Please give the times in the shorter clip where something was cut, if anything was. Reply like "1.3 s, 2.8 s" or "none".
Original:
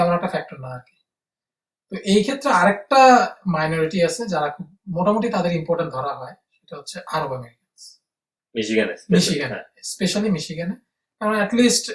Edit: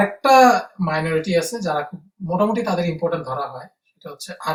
none